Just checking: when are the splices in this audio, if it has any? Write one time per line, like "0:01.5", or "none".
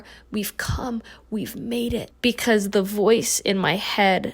0:02.1